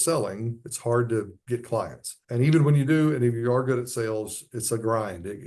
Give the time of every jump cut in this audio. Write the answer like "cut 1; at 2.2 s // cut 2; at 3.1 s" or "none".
cut 1; at 2.0 s